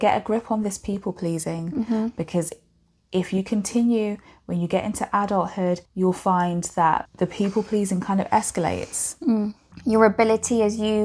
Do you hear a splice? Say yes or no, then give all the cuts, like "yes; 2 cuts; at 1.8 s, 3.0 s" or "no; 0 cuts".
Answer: yes; 3 cuts; at 5.9 s, 7.1 s, 9.7 s